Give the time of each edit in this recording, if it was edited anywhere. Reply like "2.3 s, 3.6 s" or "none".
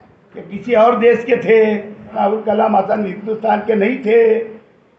2.1 s